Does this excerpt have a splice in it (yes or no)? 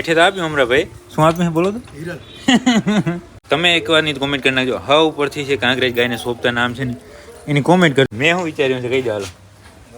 yes